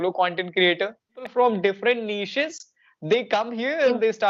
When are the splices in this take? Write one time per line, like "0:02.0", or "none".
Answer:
0:01.3